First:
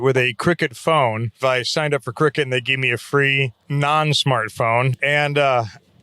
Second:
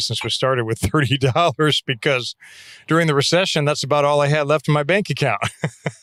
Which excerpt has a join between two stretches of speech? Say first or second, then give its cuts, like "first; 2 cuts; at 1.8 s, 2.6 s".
first; 3 cuts; at 1.4 s, 3.6 s, 5.0 s